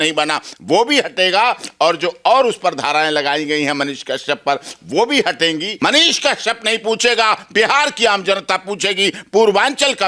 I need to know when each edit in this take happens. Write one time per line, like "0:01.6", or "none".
0:05.7